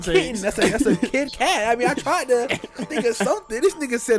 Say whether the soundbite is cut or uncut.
uncut